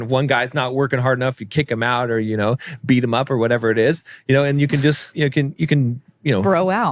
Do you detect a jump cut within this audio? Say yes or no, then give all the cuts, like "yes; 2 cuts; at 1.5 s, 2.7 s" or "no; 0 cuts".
no; 0 cuts